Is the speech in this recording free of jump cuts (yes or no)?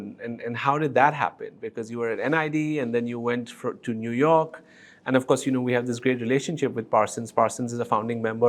yes